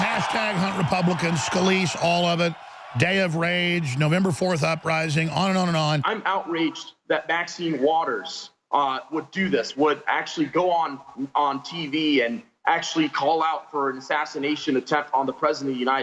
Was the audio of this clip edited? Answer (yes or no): yes